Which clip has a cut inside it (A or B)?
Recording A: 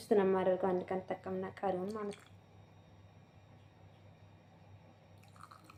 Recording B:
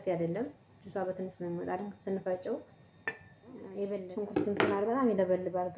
B